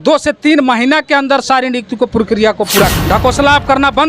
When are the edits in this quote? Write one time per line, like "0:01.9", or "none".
0:02.9